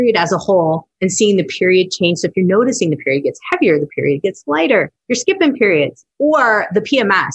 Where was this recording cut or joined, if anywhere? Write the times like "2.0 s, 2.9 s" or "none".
5.0 s, 6.0 s